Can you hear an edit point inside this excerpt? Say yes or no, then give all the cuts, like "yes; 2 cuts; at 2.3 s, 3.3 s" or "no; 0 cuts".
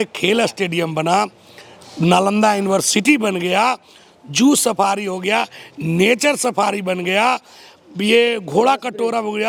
no; 0 cuts